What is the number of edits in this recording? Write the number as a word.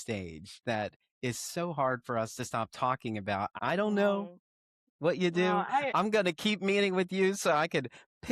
one